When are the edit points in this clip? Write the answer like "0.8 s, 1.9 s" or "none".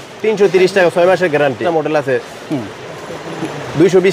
1.6 s